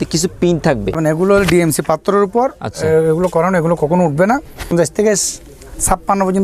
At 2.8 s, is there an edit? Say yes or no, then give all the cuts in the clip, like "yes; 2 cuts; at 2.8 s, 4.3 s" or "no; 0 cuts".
no; 2 cuts; at 1.0 s, 4.7 s